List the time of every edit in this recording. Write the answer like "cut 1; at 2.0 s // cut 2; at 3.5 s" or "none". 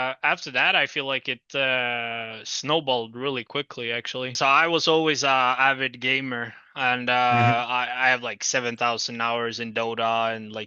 cut 1; at 4.3 s